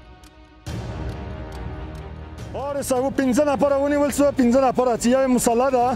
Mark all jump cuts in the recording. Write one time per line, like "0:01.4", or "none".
0:02.6